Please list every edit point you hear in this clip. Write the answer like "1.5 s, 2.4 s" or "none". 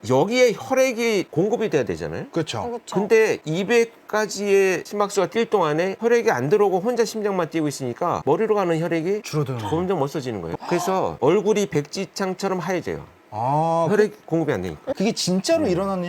10.5 s, 14.8 s